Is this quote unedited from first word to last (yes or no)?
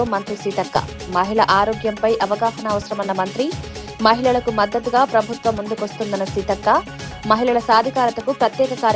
yes